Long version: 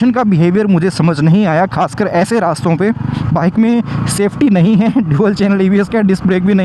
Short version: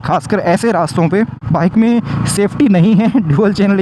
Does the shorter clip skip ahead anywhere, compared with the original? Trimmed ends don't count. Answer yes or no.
yes